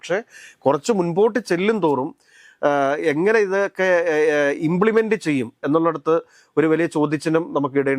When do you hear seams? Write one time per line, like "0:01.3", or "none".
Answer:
none